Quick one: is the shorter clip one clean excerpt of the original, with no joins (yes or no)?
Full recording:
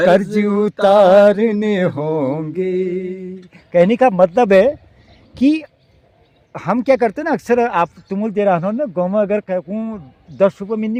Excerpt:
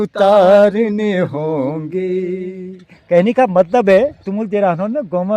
no